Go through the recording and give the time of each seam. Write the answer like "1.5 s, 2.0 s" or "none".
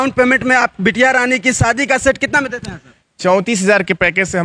none